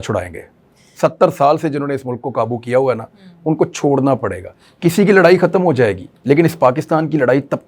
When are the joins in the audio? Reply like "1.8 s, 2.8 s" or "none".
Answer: 6.1 s